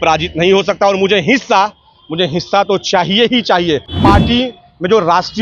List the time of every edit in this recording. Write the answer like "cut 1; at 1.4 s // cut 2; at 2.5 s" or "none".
cut 1; at 3.9 s